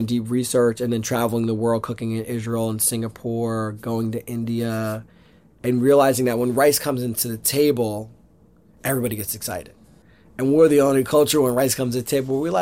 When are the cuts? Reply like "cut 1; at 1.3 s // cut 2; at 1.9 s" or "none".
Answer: none